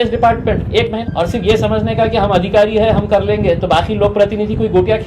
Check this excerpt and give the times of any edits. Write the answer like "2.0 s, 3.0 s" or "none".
1.0 s